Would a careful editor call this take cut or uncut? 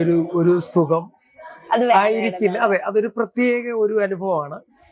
uncut